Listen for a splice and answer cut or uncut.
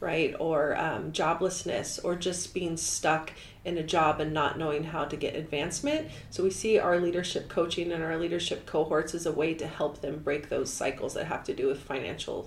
uncut